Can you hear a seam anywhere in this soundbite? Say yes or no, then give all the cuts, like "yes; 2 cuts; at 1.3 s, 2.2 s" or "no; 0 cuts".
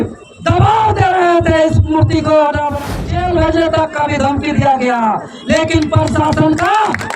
yes; 1 cut; at 3.0 s